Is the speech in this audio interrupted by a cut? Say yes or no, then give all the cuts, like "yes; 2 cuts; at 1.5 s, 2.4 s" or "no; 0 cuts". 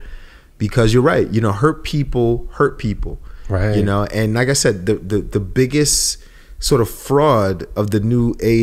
no; 0 cuts